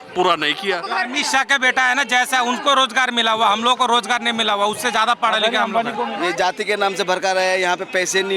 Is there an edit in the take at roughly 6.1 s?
yes; 2 cuts; at 1.0 s, 6.1 s

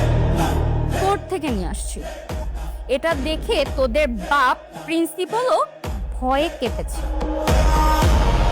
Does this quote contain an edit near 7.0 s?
no; 0 cuts

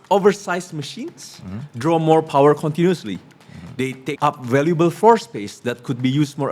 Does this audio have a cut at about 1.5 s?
no; 1 cut; at 4.1 s

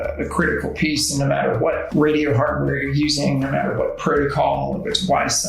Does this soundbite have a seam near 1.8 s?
yes; 1 cut; at 1.8 s

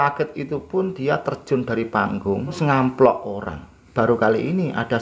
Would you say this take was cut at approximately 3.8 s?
yes; 2 cuts; at 2.6 s, 3.8 s

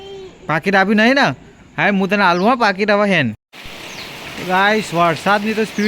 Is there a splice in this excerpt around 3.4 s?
yes; 1 cut; at 3.4 s

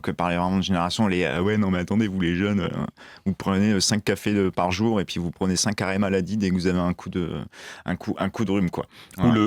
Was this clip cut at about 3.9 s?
no; 0 cuts

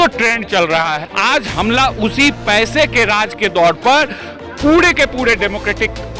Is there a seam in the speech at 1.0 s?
yes; 1 cut; at 1.0 s

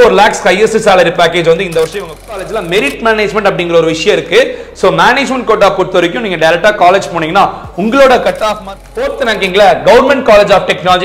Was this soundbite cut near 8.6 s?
yes; 2 cuts; at 2.4 s, 8.6 s

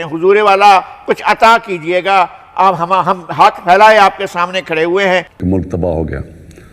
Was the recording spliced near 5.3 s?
yes; 1 cut; at 5.3 s

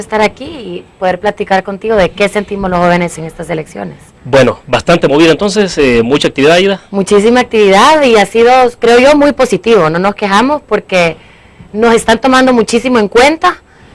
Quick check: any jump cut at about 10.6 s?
no; 1 cut; at 9.2 s

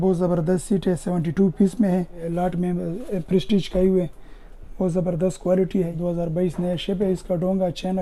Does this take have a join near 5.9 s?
yes; 2 cuts; at 2.2 s, 5.9 s

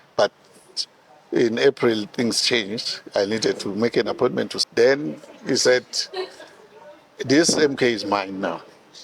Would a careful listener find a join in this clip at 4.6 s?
yes; 1 cut; at 4.6 s

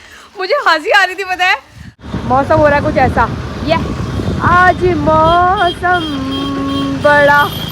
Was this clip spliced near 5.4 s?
no; 1 cut; at 2.1 s

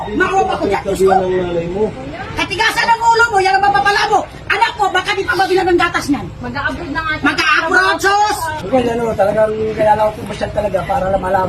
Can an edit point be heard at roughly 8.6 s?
yes; 1 cut; at 8.6 s

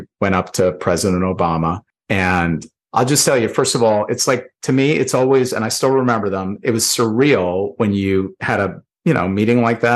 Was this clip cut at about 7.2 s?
no; 2 cuts; at 1.9 s, 2.7 s

